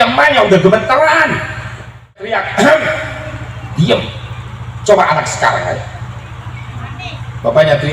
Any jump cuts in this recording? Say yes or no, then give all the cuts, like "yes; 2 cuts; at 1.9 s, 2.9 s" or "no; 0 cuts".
yes; 1 cut; at 2.4 s